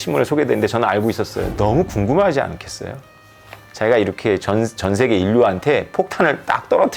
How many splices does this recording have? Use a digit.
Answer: 1